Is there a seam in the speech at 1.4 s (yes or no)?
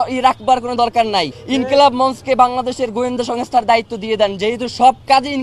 yes